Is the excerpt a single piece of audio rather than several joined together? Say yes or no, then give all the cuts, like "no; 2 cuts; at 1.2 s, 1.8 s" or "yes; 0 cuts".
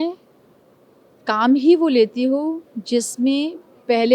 yes; 0 cuts